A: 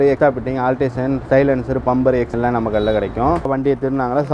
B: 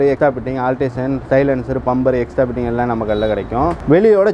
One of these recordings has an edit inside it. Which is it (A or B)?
A